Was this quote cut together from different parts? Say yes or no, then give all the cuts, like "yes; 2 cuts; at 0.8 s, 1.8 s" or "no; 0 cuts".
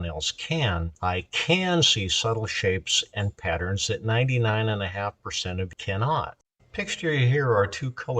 yes; 2 cuts; at 0.9 s, 5.8 s